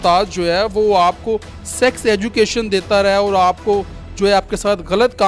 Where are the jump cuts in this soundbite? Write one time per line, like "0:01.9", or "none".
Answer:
none